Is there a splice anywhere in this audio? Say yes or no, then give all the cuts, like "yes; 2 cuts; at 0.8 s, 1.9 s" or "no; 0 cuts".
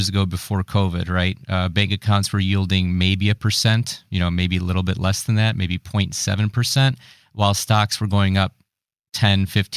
no; 0 cuts